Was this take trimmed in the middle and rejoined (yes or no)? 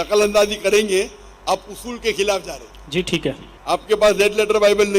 yes